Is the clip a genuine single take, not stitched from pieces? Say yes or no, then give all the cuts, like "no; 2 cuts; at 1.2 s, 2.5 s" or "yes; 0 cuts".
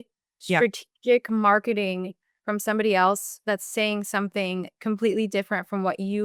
yes; 0 cuts